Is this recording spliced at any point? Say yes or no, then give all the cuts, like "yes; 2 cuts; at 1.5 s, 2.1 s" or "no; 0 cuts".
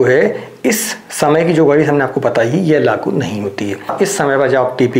yes; 1 cut; at 3.9 s